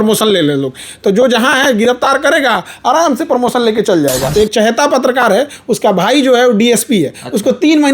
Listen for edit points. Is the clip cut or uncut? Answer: cut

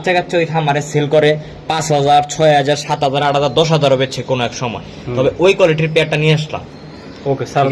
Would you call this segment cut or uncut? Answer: uncut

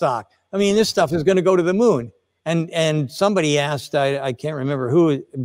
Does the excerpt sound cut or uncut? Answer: cut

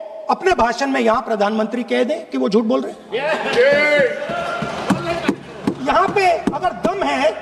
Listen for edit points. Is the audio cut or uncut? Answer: uncut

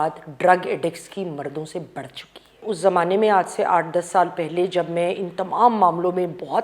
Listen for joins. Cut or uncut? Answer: cut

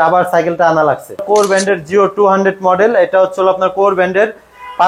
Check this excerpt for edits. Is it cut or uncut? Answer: cut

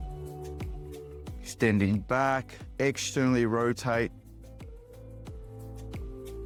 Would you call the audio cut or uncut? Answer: uncut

